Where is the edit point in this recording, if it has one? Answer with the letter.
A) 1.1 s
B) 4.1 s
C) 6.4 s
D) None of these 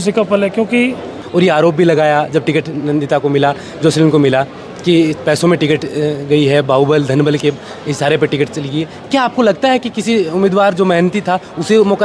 A